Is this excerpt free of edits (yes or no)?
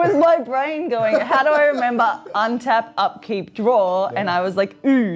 yes